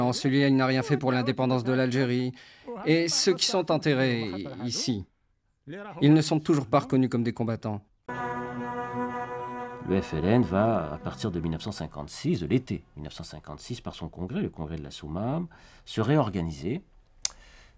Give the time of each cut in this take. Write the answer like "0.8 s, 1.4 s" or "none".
8.1 s